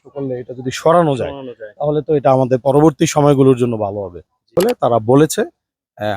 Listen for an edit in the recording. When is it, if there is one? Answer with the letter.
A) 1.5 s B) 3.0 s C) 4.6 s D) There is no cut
C